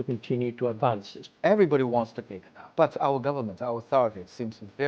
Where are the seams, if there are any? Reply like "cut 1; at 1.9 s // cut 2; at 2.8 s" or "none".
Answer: cut 1; at 1.2 s // cut 2; at 2.7 s